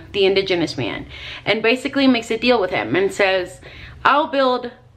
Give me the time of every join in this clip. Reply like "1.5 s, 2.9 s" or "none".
none